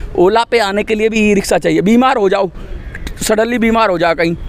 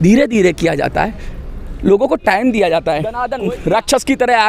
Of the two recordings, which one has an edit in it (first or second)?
second